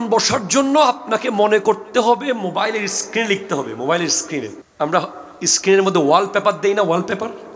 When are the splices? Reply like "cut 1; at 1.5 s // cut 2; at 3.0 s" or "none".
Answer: cut 1; at 4.6 s